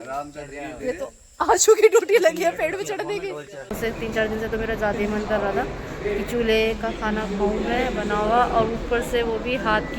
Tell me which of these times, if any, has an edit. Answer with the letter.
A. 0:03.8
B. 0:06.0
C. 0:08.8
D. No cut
A